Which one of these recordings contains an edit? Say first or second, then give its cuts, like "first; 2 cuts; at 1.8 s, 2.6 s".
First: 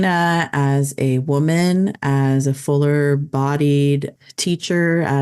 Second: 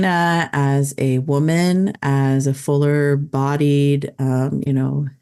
first; 1 cut; at 4.1 s